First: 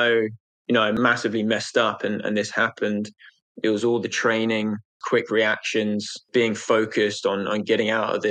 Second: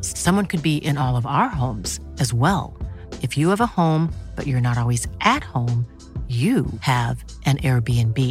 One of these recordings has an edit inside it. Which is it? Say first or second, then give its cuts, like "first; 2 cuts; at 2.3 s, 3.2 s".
first; 3 cuts; at 1.0 s, 5.0 s, 6.2 s